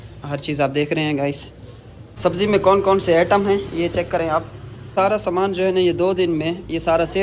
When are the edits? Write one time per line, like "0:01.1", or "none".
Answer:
0:02.0
0:04.9

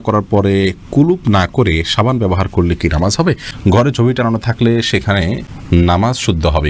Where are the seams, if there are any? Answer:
0:03.5
0:05.5

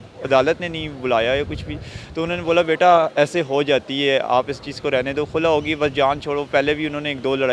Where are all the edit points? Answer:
none

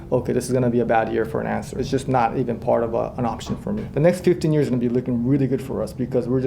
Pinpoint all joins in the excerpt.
0:01.7
0:03.9

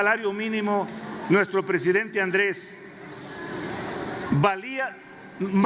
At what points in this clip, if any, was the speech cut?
none

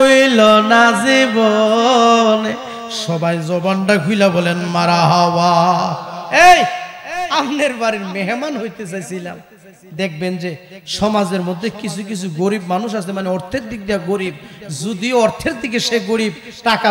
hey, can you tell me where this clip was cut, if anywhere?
none

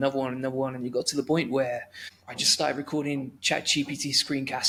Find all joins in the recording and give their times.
none

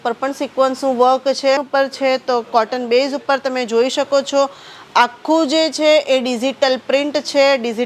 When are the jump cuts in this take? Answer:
0:01.6

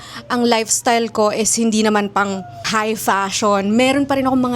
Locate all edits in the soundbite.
0:02.7

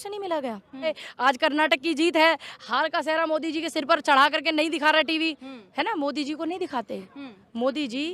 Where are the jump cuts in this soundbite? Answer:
0:01.0

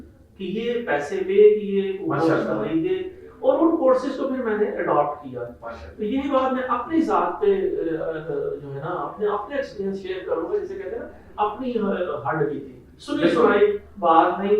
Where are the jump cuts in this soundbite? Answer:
none

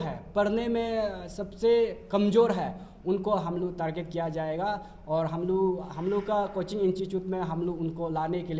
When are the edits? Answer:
none

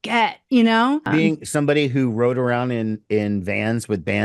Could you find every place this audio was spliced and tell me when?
0:01.1

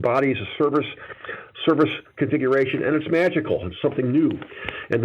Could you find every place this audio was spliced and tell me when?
none

